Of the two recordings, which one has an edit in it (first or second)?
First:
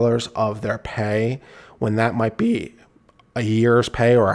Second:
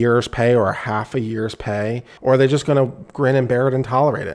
second